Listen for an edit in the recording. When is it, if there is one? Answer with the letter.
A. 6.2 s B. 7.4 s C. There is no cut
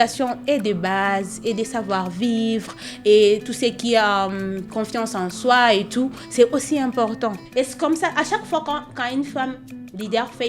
B